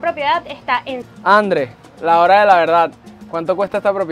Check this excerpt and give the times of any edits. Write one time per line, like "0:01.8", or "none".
0:01.0